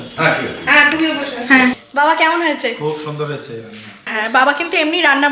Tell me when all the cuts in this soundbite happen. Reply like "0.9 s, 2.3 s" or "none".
1.8 s, 4.1 s